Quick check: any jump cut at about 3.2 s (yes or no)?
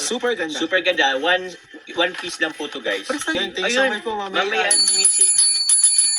no